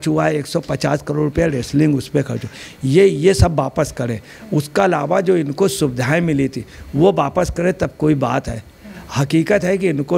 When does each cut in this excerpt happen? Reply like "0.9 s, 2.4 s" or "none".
none